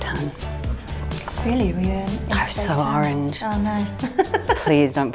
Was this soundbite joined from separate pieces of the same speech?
no; 0 cuts

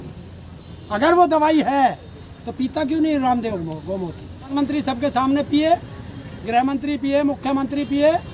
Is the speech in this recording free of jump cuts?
no; 1 cut; at 4.5 s

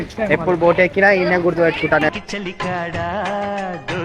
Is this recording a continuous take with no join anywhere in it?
no; 1 cut; at 2.1 s

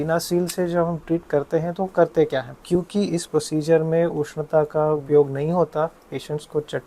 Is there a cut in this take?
yes; 2 cuts; at 2.6 s, 5.0 s

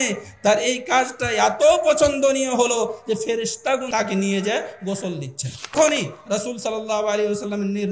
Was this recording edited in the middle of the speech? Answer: yes; 2 cuts; at 3.9 s, 5.7 s

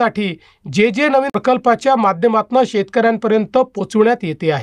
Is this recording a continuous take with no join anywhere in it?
no; 1 cut; at 1.3 s

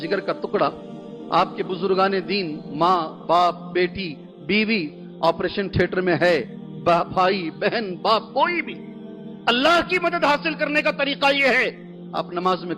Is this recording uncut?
yes; 0 cuts

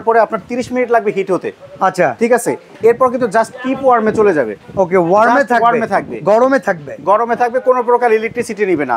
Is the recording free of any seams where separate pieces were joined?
yes; 0 cuts

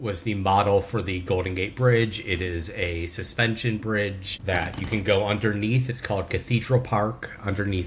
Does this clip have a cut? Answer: no; 0 cuts

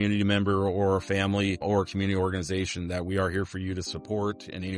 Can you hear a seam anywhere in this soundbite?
yes; 1 cut; at 1.6 s

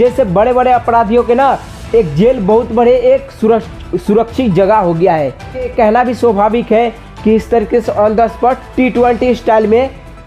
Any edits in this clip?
yes; 1 cut; at 5.7 s

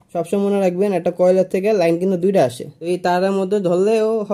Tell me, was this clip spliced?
yes; 1 cut; at 2.7 s

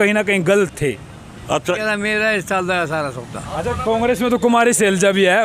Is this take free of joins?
no; 1 cut; at 1.8 s

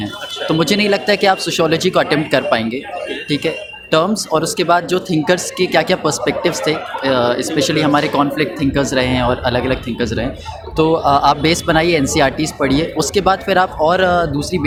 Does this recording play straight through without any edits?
yes; 0 cuts

